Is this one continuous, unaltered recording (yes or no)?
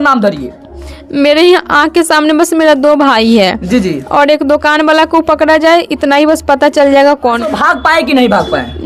no